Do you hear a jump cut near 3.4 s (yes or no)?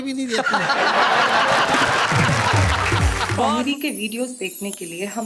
yes